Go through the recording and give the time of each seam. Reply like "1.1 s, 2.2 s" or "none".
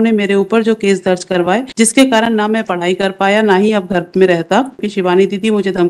1.7 s, 4.9 s